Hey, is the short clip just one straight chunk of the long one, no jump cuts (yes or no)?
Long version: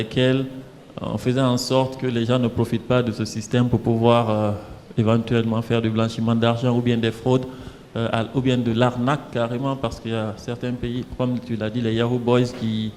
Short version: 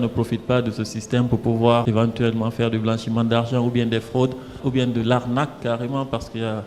no